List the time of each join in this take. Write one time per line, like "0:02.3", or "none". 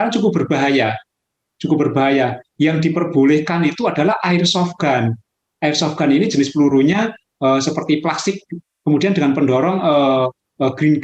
none